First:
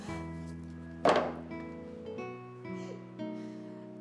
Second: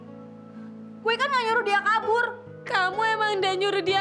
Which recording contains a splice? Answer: first; 1 cut; at 1.9 s

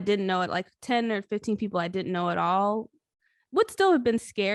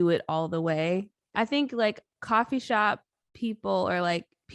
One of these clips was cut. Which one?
second; 1 cut; at 1.2 s

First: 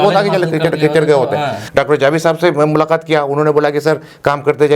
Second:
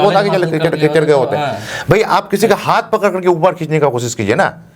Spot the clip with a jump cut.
first; 1 cut; at 1.6 s

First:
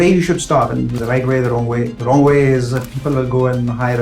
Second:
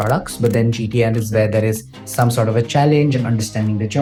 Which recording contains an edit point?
first; 2 cuts; at 1.0 s, 2.0 s

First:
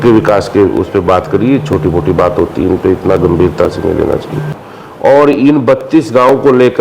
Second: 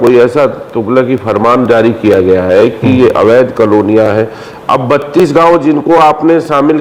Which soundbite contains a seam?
first; 1 cut; at 4.5 s

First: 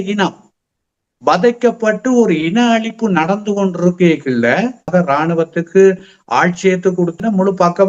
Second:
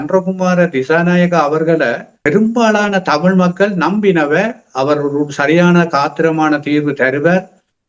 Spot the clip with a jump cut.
first; 2 cuts; at 4.9 s, 7.2 s

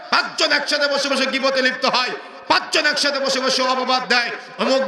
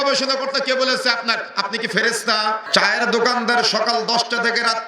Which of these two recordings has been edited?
second; 1 cut; at 2.6 s

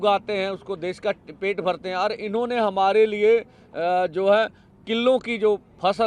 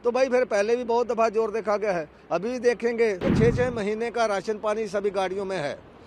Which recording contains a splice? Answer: second; 1 cut; at 3.3 s

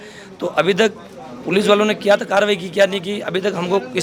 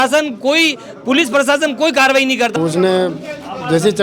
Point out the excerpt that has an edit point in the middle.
second; 1 cut; at 2.5 s

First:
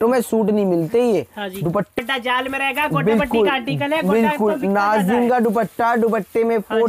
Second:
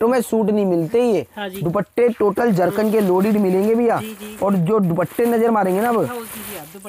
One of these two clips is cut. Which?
first; 1 cut; at 1.9 s

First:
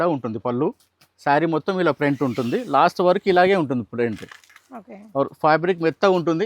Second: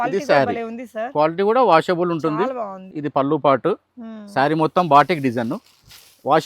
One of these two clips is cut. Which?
second; 1 cut; at 2.8 s

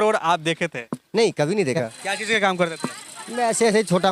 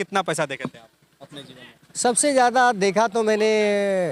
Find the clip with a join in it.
first; 1 cut; at 2.0 s

